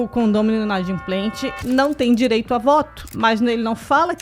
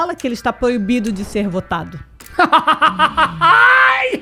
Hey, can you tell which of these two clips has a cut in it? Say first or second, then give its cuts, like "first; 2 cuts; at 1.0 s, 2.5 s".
first; 1 cut; at 3.1 s